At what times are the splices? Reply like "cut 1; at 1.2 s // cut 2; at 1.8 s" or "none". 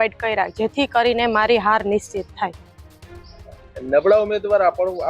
none

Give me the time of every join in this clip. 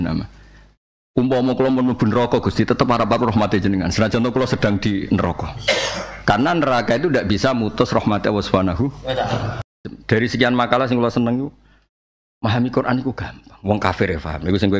cut 1; at 9.8 s

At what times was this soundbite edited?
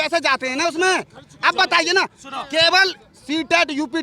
none

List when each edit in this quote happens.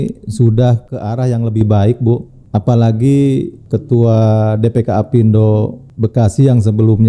cut 1; at 0.9 s // cut 2; at 2.3 s // cut 3; at 3.6 s // cut 4; at 5.8 s

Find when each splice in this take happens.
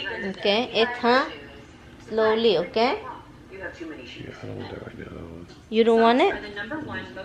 none

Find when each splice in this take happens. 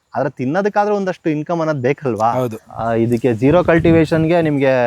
cut 1; at 2.6 s

